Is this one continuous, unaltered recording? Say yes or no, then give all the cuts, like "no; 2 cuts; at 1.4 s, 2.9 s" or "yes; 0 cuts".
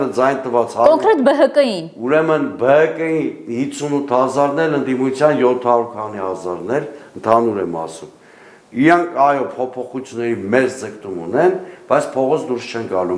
yes; 0 cuts